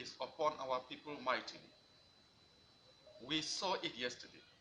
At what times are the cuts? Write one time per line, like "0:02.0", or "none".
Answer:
none